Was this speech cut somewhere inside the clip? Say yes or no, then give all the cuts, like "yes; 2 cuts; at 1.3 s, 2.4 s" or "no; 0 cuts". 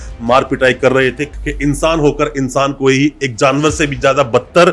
yes; 1 cut; at 1.3 s